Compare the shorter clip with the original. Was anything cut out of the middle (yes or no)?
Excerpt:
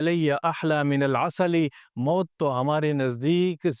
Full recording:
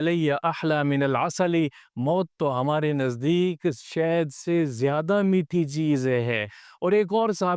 no